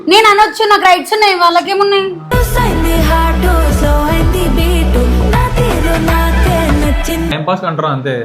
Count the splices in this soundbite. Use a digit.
1